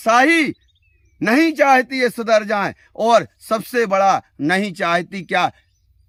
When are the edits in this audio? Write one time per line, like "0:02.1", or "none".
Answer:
none